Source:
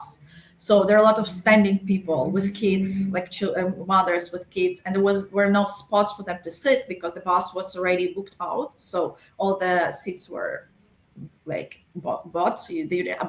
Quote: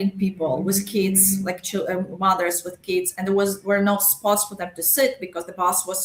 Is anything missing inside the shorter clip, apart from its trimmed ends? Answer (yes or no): no